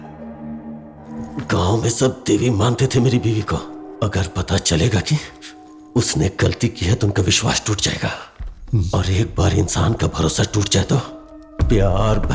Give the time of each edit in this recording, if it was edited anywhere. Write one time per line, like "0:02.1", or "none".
0:01.1